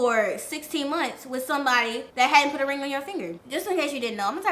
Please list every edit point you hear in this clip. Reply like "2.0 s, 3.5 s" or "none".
2.0 s, 3.3 s